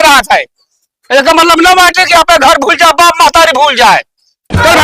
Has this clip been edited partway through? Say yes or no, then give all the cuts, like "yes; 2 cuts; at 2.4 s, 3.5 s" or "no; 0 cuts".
no; 0 cuts